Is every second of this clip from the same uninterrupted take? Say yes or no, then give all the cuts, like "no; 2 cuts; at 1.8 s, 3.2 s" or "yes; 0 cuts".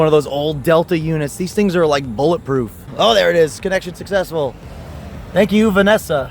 no; 1 cut; at 2.9 s